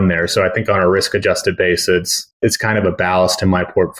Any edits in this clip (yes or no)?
yes